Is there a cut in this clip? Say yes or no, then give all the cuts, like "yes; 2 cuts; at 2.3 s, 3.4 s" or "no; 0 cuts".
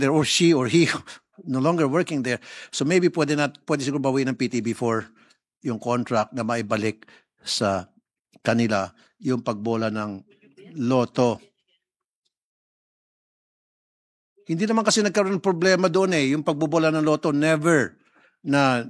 no; 0 cuts